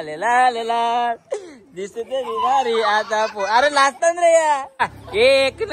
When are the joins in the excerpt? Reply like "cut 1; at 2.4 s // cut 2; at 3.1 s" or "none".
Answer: cut 1; at 4.8 s